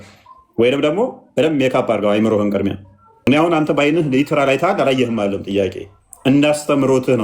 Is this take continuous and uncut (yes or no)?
no